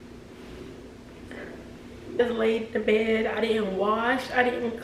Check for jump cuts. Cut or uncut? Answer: cut